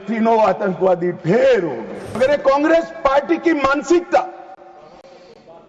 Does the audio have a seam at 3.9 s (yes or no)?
no